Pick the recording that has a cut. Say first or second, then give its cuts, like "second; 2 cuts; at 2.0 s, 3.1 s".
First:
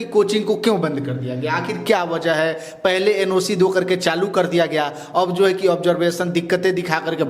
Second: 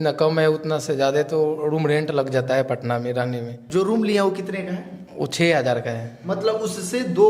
second; 1 cut; at 3.6 s